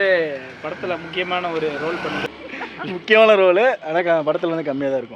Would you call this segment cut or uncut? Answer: cut